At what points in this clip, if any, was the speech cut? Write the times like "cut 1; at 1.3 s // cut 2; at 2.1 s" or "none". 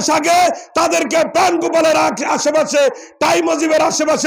none